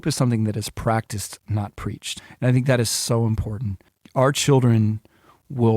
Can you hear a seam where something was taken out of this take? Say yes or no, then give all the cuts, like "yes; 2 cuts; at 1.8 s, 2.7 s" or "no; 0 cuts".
yes; 2 cuts; at 2.2 s, 3.9 s